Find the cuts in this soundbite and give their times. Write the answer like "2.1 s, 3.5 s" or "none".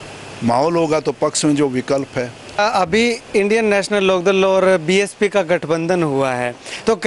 2.6 s